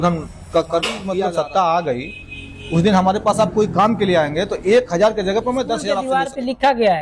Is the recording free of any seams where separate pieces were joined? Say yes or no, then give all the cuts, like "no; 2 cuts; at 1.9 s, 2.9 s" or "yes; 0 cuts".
no; 2 cuts; at 1.1 s, 5.9 s